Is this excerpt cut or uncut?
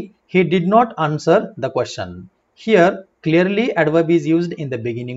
uncut